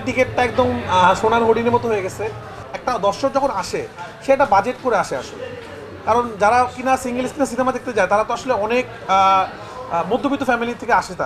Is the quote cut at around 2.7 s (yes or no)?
yes